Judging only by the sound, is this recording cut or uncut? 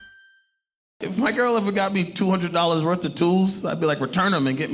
cut